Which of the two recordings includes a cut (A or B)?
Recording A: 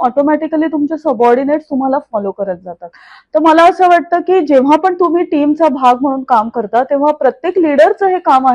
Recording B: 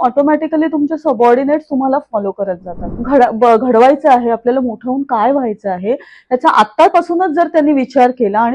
B